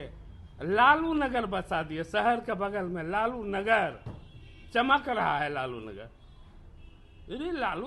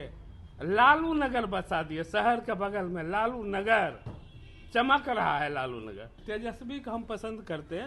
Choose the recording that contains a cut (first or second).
second